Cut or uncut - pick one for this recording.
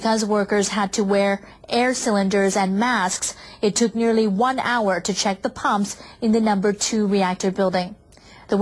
uncut